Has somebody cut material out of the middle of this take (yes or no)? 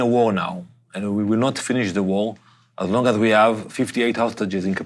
no